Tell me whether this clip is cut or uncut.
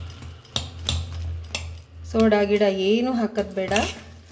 uncut